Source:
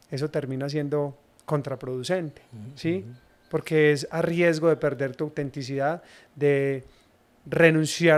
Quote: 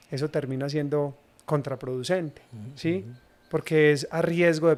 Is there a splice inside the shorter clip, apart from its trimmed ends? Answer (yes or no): no